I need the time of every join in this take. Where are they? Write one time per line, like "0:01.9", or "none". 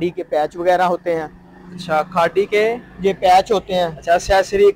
none

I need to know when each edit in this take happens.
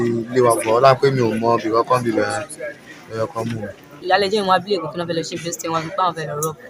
0:04.0

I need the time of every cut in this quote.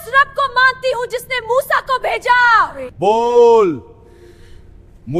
0:02.8

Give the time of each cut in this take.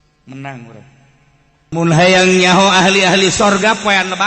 0:01.7

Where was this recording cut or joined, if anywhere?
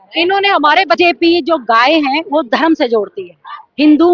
0:01.0

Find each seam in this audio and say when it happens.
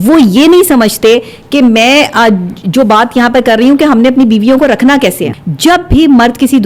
0:05.3

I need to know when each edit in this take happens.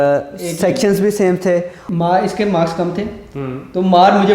0:01.8

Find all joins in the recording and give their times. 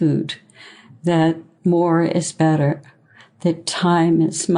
0:01.5

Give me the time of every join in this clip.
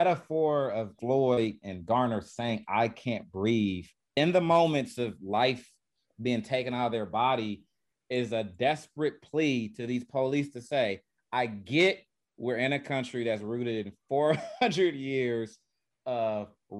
0:01.2
0:04.1

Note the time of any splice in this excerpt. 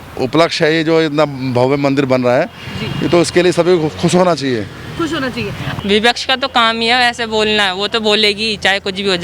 0:05.6

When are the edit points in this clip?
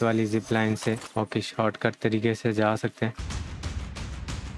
0:01.1
0:03.2

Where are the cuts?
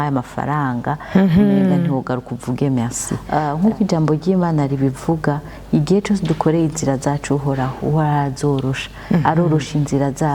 0:03.1

